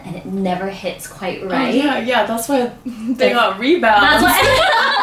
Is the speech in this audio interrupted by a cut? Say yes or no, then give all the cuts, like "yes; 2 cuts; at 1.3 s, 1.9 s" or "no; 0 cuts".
no; 0 cuts